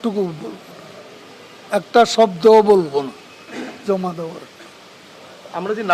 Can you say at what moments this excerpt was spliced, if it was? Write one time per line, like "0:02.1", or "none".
none

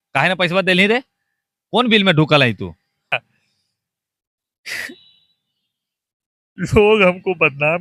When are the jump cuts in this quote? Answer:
0:03.1

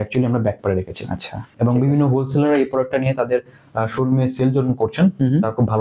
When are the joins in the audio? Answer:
0:01.5

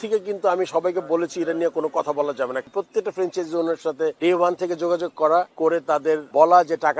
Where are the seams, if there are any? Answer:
0:02.6
0:04.2
0:05.9

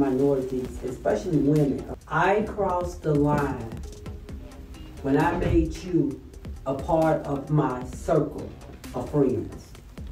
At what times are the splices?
0:01.9

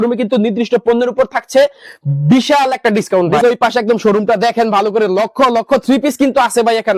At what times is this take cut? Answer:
0:03.4

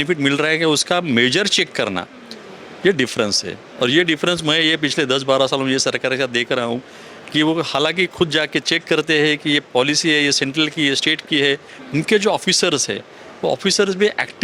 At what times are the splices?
none

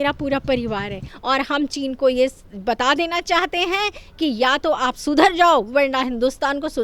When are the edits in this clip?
0:01.1

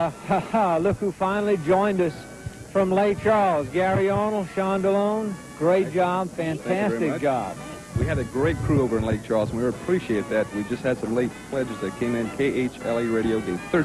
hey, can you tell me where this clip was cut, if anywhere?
none

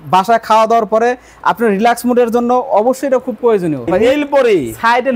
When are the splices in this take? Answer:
0:03.9

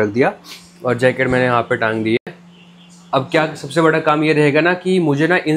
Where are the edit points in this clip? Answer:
none

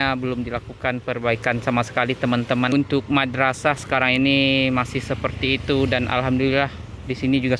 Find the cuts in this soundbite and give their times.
0:02.7

